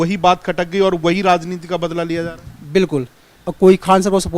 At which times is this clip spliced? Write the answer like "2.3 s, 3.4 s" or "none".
3.3 s